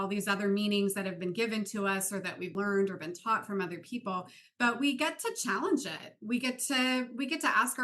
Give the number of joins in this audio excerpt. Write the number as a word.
one